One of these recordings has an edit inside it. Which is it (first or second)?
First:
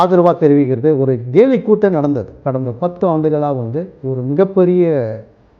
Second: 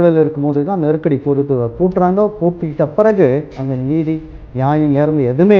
first